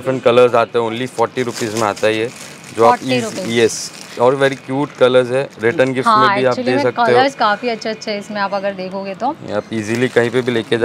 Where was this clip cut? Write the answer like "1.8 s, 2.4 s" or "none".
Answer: none